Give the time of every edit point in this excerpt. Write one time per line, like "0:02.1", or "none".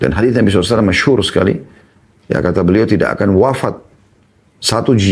none